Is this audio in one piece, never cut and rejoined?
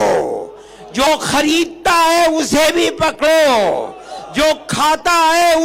yes; 0 cuts

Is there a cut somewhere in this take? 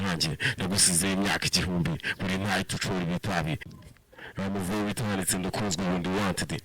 yes; 1 cut; at 3.7 s

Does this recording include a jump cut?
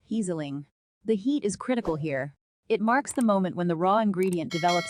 no; 0 cuts

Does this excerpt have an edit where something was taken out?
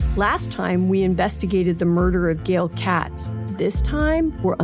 no; 0 cuts

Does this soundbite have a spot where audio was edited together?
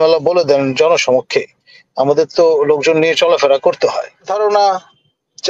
yes; 1 cut; at 4.3 s

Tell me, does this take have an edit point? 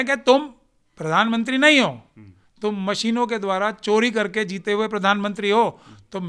no; 0 cuts

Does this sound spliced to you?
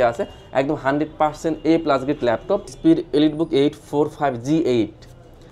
yes; 1 cut; at 2.7 s

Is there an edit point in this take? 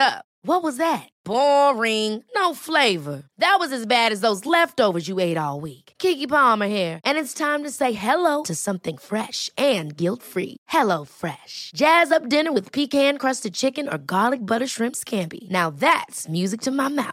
no; 0 cuts

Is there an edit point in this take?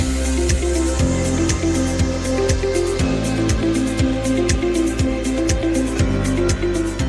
no; 0 cuts

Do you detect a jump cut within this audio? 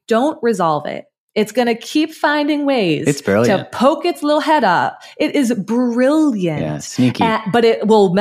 no; 0 cuts

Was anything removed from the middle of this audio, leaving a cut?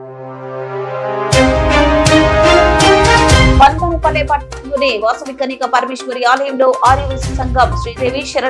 yes; 1 cut; at 3.5 s

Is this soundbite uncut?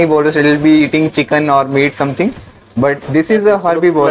yes; 0 cuts

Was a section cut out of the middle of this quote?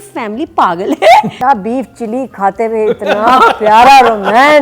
yes; 1 cut; at 1.3 s

